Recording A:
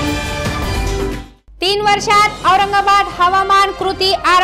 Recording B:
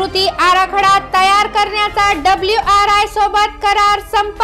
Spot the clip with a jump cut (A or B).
A